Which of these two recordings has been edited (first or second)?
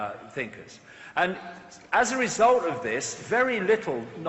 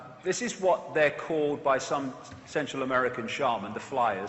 second